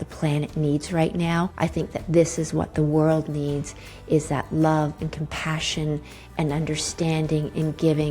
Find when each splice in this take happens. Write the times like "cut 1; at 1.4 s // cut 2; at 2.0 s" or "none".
cut 1; at 1.5 s